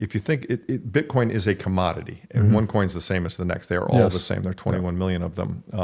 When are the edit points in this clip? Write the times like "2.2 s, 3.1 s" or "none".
3.0 s